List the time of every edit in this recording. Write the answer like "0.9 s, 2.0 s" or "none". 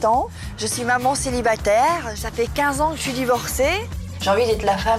1.9 s, 4.0 s